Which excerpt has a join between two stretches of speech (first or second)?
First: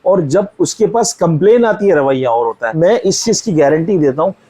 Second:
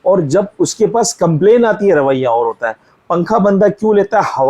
first